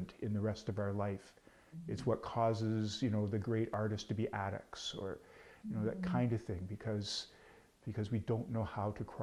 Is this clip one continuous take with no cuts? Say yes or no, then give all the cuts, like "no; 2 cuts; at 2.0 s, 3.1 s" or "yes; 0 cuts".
yes; 0 cuts